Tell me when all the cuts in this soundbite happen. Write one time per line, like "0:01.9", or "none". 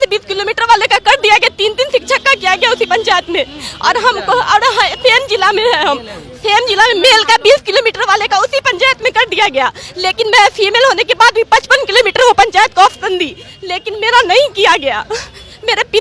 none